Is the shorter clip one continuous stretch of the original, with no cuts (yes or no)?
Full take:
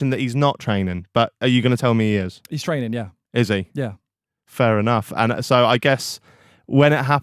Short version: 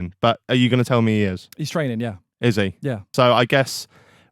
no